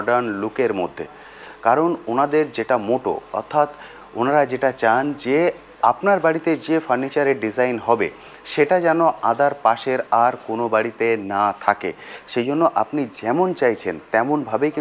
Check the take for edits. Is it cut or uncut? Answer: uncut